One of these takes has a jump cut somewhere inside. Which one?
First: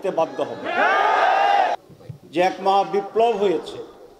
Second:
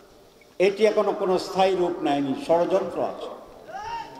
first; 1 cut; at 1.8 s

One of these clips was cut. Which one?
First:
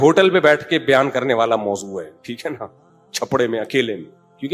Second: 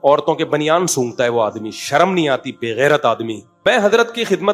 second; 1 cut; at 3.6 s

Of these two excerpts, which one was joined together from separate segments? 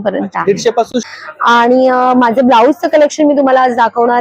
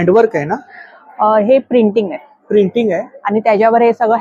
first; 1 cut; at 1.0 s

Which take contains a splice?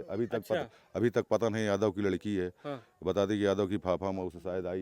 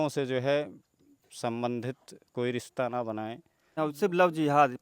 second; 1 cut; at 3.8 s

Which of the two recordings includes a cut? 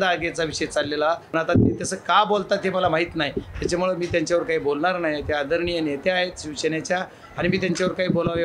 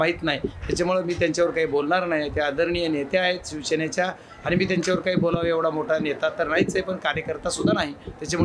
first; 1 cut; at 1.2 s

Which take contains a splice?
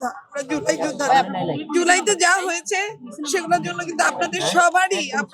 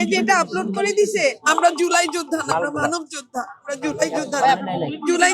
second; 1 cut; at 1.4 s

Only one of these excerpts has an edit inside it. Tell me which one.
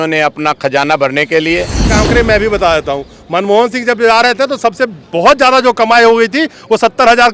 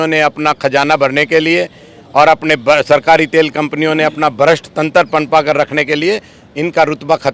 first; 1 cut; at 2.0 s

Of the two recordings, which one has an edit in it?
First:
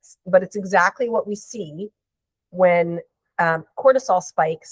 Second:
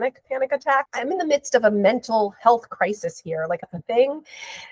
second; 2 cuts; at 0.9 s, 3.7 s

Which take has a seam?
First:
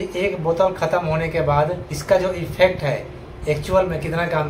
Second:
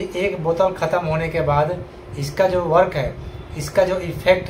first; 1 cut; at 1.9 s

